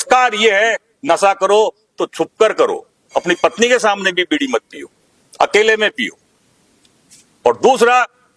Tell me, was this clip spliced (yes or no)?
no